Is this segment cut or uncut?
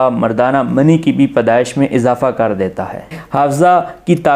cut